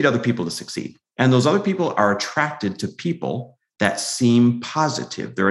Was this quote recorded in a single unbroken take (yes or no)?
yes